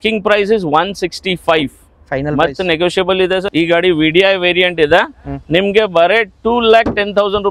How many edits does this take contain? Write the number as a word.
one